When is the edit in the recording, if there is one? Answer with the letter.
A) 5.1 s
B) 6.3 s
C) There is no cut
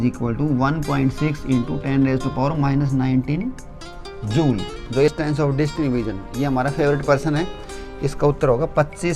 A